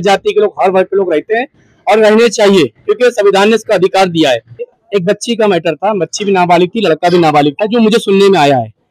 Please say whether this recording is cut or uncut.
cut